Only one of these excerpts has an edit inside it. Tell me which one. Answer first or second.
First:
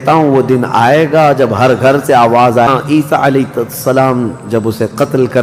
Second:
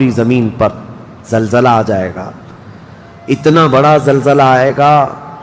first